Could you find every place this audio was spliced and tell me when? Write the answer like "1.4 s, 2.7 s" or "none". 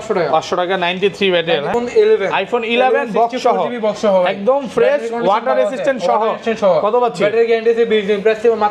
1.7 s